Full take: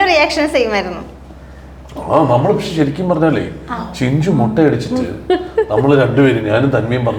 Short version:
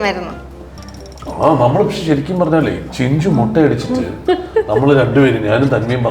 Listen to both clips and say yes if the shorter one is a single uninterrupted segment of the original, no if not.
no